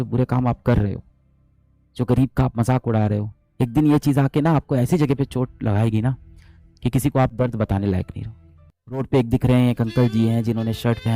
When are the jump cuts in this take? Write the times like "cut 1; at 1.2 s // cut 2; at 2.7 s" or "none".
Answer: cut 1; at 9.0 s